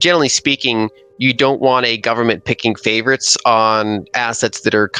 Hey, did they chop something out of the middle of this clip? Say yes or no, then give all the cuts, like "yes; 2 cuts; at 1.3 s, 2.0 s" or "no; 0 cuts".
no; 0 cuts